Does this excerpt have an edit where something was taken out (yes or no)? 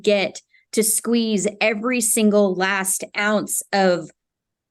no